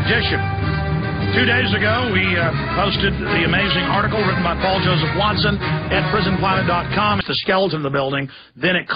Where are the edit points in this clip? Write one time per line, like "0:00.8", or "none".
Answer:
none